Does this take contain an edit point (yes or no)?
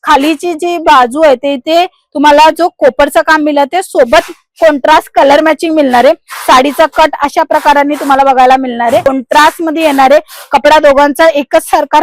yes